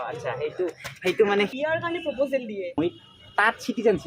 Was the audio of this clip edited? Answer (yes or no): yes